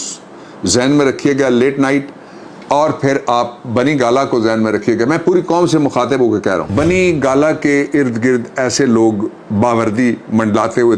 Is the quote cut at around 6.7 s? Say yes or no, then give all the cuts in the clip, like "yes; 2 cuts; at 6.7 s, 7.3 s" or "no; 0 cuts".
yes; 1 cut; at 6.7 s